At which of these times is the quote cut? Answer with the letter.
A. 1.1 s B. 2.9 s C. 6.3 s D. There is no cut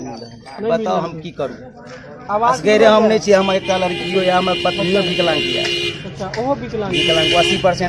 D